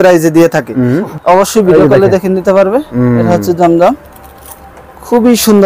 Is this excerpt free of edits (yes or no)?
no